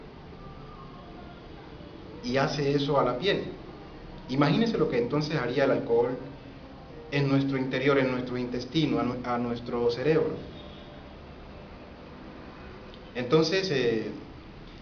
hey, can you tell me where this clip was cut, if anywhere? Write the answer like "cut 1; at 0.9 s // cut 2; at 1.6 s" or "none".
none